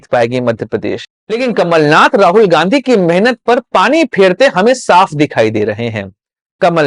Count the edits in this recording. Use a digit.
1